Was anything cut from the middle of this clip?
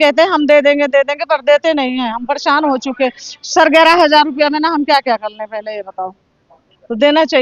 no; 0 cuts

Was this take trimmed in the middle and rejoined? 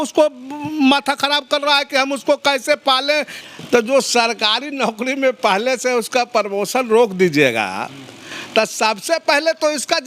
yes; 1 cut; at 3.3 s

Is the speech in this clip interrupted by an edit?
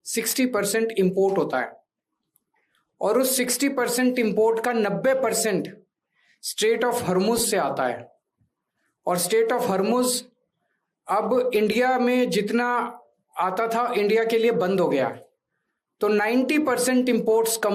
no; 0 cuts

